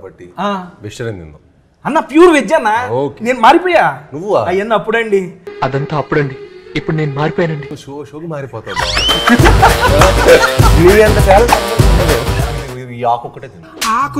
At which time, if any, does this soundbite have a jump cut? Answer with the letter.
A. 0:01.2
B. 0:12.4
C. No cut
B